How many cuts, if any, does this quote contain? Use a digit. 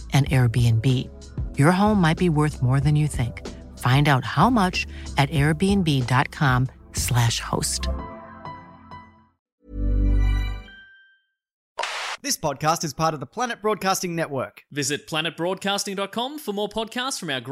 2